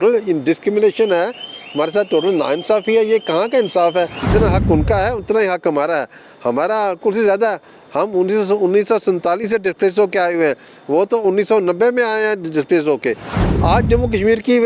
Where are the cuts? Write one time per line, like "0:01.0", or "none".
0:04.2
0:13.3

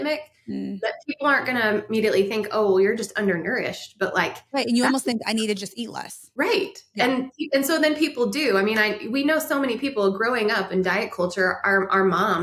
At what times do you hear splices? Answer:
none

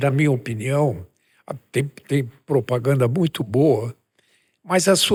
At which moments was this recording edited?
none

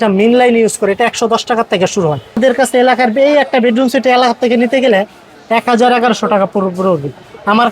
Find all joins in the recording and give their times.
0:02.4

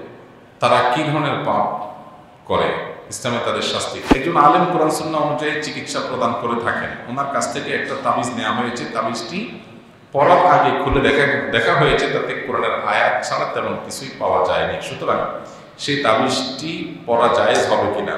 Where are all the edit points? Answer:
0:04.1

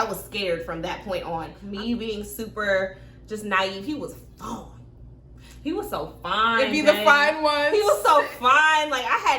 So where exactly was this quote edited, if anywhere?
0:01.6

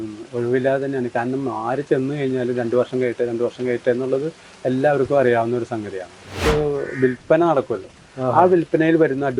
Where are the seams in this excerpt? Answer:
0:06.4

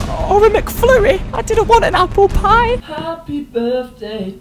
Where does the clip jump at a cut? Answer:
0:02.9

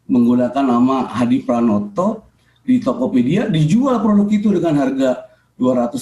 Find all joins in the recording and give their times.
none

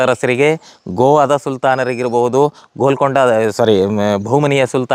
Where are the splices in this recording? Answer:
none

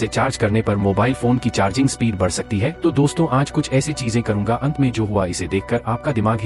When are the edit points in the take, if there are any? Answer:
none

